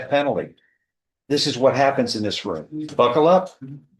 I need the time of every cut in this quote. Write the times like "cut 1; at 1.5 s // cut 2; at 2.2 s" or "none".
cut 1; at 2.9 s